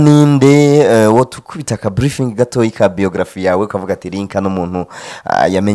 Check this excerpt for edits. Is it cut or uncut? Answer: uncut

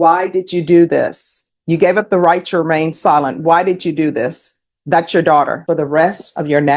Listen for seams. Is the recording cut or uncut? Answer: cut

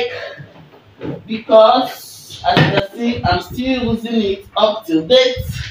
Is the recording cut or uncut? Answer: cut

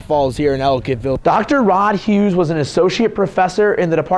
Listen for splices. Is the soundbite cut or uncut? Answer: cut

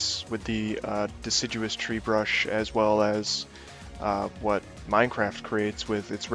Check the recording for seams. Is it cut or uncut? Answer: uncut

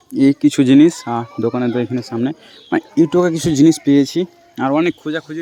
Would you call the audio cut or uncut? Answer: uncut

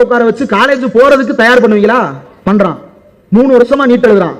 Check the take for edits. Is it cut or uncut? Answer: cut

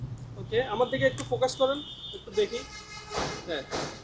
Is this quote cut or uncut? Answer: uncut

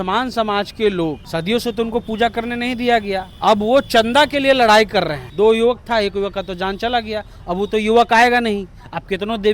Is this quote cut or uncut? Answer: cut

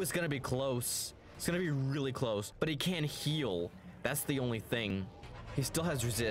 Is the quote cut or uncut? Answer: cut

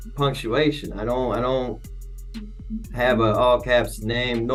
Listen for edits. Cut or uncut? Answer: uncut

